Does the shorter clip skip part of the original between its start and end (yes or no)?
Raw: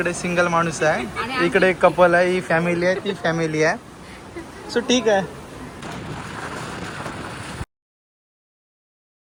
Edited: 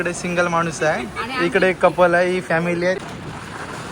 yes